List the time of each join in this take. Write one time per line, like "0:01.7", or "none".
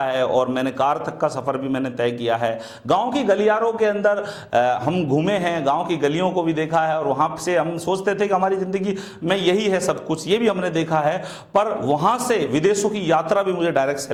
none